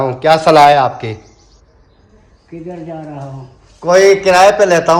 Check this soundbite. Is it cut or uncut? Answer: uncut